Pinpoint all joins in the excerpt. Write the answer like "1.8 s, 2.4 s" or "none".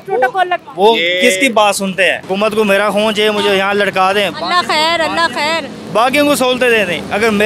2.2 s